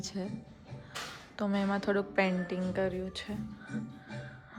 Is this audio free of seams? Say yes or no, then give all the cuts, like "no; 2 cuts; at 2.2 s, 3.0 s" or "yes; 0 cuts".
yes; 0 cuts